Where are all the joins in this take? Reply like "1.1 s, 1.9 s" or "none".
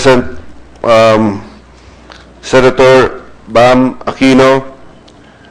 none